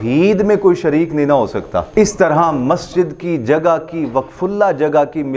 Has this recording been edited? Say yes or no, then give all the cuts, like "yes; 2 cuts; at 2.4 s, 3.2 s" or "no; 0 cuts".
yes; 1 cut; at 1.9 s